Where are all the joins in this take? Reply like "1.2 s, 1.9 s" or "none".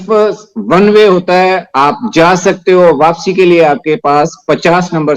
none